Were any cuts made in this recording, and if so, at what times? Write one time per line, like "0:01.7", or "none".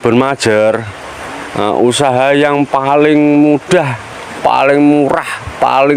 none